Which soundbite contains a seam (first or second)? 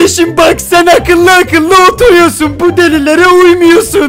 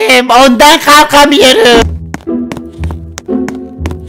second